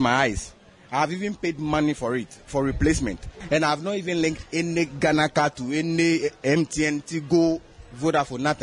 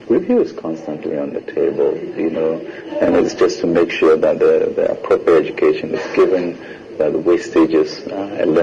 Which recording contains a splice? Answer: first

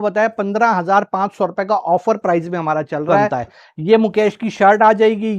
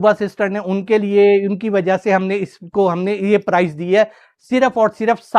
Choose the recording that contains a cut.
first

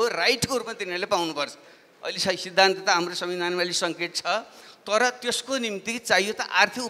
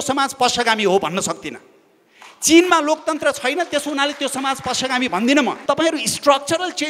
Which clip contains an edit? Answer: second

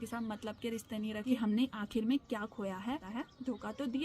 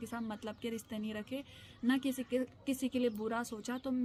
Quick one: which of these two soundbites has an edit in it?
first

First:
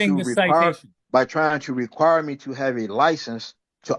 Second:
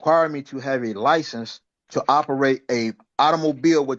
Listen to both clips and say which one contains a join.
first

